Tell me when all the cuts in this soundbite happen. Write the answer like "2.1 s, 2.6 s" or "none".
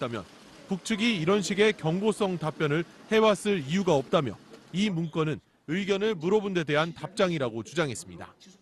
1.0 s